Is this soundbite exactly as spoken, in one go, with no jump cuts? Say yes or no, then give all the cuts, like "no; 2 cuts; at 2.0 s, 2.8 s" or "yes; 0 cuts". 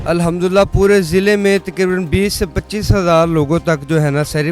yes; 0 cuts